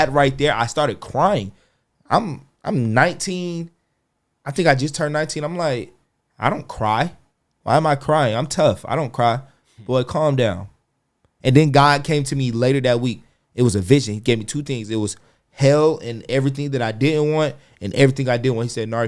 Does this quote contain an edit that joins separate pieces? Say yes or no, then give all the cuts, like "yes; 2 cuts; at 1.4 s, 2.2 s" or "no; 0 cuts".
no; 0 cuts